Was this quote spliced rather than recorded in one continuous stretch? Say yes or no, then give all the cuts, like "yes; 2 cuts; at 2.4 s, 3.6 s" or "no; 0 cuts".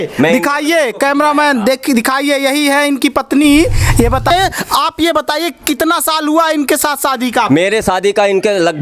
yes; 1 cut; at 4.3 s